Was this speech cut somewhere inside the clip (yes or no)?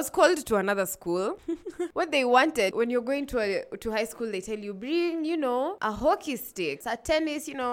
yes